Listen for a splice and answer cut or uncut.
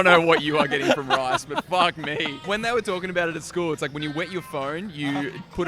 cut